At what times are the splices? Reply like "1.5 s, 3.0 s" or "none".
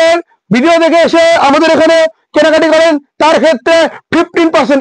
none